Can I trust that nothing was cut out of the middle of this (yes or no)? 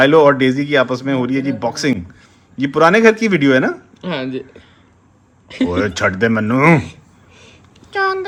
yes